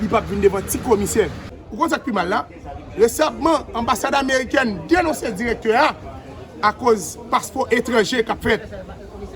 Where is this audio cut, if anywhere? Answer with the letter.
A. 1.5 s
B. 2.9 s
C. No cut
A